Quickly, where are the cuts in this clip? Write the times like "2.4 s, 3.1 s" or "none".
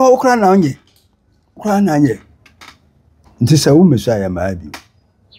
3.2 s